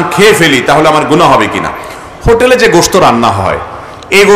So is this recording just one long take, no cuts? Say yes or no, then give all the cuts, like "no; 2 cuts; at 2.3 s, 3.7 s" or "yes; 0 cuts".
yes; 0 cuts